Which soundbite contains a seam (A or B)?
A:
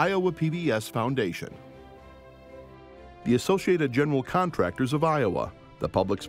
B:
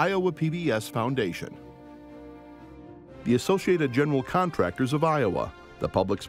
A